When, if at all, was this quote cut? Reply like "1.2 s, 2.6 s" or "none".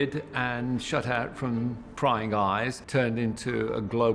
2.8 s